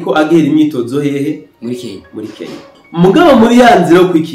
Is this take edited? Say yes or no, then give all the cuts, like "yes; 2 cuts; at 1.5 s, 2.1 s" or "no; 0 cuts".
yes; 1 cut; at 2.8 s